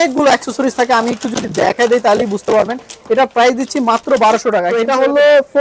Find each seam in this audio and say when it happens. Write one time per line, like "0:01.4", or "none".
0:04.7